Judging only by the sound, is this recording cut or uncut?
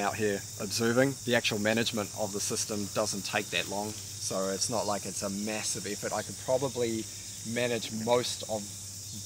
cut